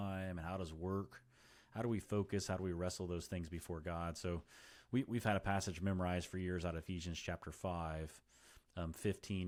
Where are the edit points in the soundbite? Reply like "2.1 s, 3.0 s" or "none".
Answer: none